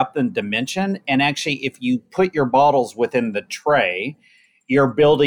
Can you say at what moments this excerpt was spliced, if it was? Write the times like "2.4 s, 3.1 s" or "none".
none